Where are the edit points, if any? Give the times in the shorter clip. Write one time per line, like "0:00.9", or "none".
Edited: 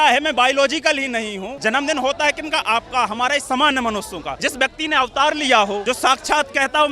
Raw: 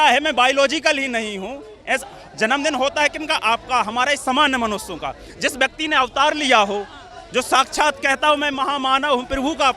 0:01.5
0:04.3
0:05.8